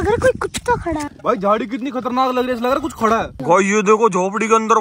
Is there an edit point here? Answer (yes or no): yes